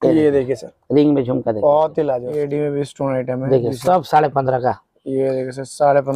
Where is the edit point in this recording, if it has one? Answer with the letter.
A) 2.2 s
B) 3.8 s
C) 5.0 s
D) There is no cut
A